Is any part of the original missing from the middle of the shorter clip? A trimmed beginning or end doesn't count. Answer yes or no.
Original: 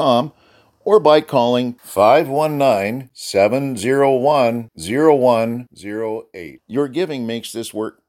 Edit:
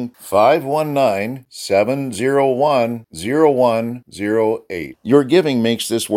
no